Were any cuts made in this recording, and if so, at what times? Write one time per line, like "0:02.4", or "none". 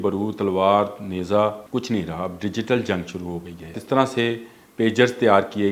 0:01.6
0:03.8